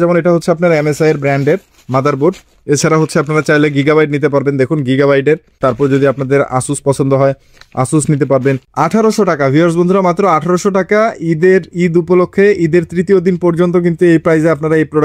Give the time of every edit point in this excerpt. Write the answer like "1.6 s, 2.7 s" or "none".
5.6 s, 8.7 s